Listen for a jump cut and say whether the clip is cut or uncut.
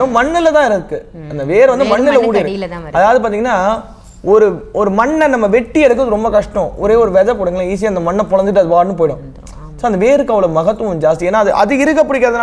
uncut